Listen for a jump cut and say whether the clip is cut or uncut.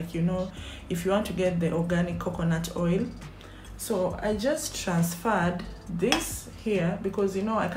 uncut